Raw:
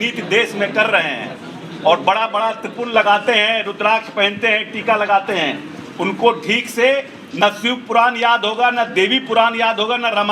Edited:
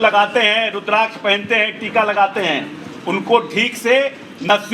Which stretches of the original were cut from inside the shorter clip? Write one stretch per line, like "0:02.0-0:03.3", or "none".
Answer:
none